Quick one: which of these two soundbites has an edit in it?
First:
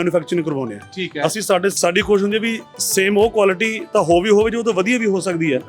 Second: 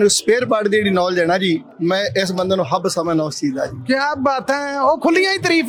first; 1 cut; at 1.8 s

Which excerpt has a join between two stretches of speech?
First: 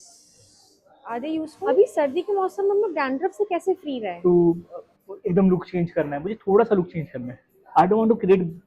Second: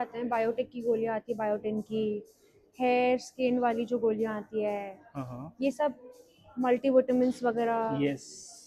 first; 2 cuts; at 1.8 s, 4.1 s

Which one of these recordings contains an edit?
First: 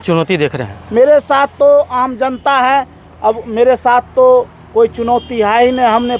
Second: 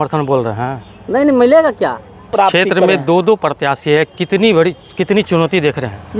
second; 1 cut; at 2.3 s

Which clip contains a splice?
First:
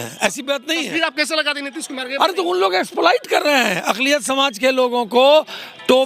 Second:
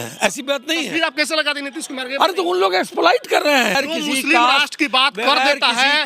second; 1 cut; at 3.8 s

